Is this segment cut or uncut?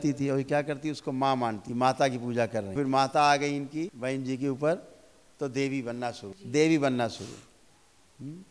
cut